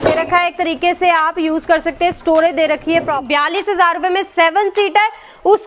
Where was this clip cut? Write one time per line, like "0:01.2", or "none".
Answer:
0:03.2